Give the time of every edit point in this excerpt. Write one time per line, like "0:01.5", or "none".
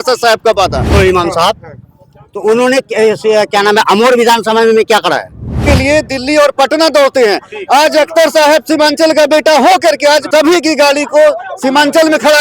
0:00.9
0:05.6
0:10.3